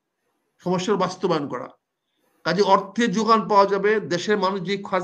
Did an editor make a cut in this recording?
no; 0 cuts

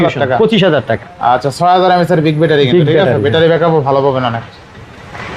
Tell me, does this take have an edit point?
no; 0 cuts

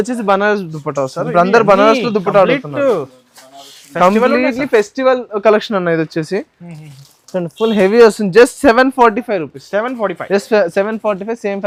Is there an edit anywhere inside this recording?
no; 0 cuts

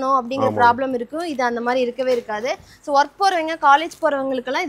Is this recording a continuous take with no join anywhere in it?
yes; 0 cuts

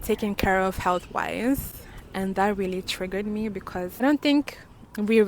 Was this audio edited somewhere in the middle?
yes; 1 cut; at 4.0 s

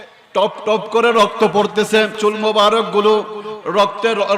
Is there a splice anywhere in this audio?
yes; 1 cut; at 2.2 s

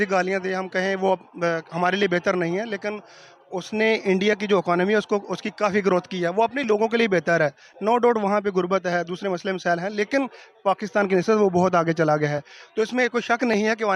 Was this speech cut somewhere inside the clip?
no; 0 cuts

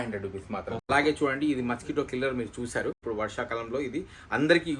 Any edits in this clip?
yes; 2 cuts; at 0.8 s, 3.0 s

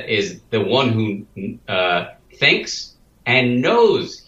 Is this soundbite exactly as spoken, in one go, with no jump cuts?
yes; 0 cuts

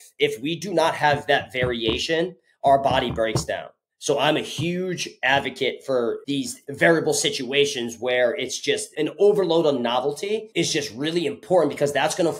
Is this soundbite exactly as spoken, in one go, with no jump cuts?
no; 2 cuts; at 6.2 s, 10.5 s

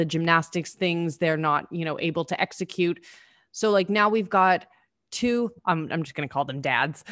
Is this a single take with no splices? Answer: yes; 0 cuts

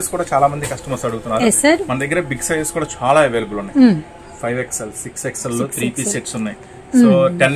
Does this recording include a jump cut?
no; 0 cuts

